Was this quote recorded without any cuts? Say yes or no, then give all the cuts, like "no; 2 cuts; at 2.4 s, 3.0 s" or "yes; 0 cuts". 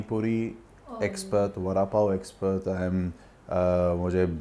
yes; 0 cuts